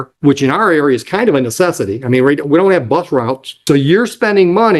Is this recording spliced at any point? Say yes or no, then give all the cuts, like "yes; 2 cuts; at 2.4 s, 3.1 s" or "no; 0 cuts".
yes; 1 cut; at 3.5 s